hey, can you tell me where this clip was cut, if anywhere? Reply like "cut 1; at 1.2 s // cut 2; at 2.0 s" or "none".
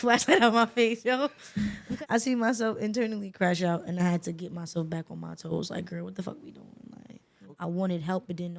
cut 1; at 1.8 s // cut 2; at 7.3 s